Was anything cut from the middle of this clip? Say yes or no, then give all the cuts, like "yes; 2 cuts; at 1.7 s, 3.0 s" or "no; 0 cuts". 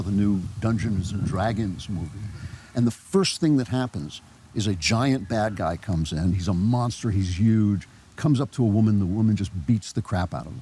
yes; 2 cuts; at 4.1 s, 6.4 s